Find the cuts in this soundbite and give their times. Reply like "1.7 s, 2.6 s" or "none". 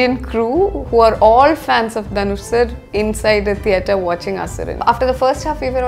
4.7 s

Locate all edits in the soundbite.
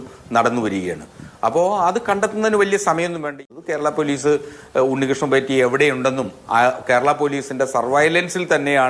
3.3 s

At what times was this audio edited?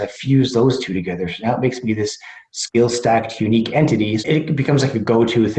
4.2 s

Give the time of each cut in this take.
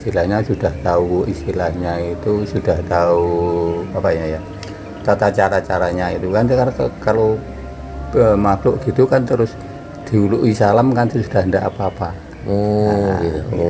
none

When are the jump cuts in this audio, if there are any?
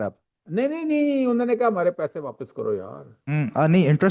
none

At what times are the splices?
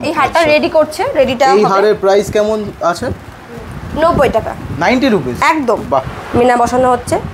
6.2 s

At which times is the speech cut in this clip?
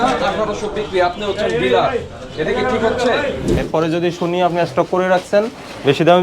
3.6 s

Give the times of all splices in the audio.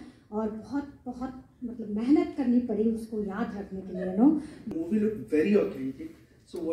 4.6 s

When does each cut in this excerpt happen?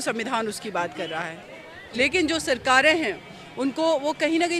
1.8 s

